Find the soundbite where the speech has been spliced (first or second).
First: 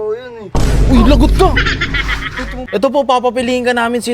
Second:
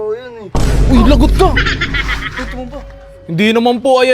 first